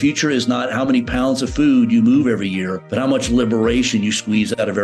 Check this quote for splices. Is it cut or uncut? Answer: cut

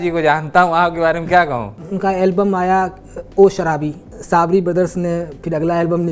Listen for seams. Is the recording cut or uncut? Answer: cut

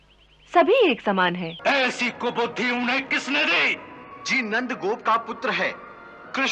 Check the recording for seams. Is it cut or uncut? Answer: cut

